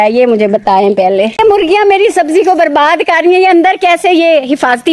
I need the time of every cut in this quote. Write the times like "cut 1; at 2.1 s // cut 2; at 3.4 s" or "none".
cut 1; at 1.4 s